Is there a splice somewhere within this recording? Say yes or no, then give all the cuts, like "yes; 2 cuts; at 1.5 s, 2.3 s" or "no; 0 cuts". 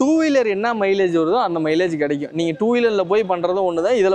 no; 0 cuts